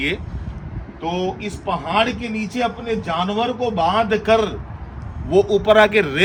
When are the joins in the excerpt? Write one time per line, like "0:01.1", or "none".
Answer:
none